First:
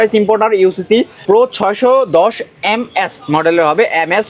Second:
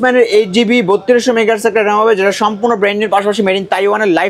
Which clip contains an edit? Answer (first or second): first